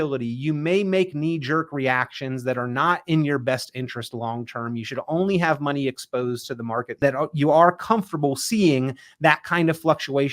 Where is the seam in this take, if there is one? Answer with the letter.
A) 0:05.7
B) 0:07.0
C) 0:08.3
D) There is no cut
B